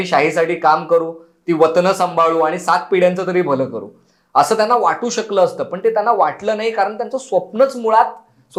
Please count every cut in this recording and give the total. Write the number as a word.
zero